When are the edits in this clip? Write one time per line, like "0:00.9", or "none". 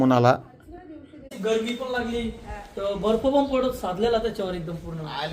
0:01.2